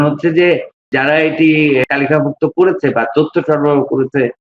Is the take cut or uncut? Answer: cut